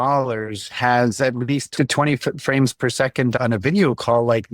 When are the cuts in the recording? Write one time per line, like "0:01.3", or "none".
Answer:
0:01.7
0:03.4